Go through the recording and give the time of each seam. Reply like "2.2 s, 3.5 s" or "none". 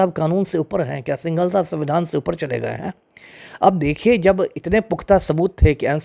none